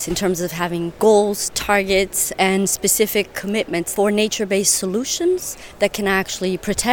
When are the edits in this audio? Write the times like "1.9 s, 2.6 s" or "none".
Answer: 0.9 s, 3.9 s